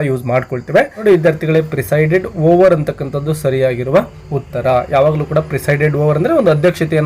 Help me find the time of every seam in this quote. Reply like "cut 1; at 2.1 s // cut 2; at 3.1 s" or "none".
cut 1; at 0.9 s